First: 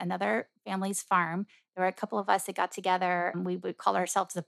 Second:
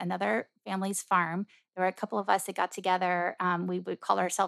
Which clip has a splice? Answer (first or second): first